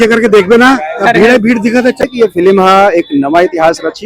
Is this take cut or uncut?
cut